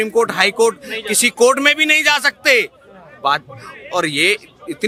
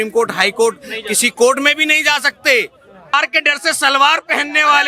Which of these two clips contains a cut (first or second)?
second